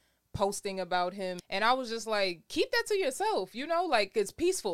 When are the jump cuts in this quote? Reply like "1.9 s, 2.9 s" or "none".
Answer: 1.4 s